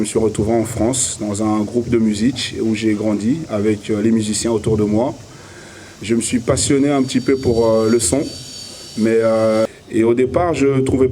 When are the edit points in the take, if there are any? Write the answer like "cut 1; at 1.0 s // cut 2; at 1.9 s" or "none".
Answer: cut 1; at 9.7 s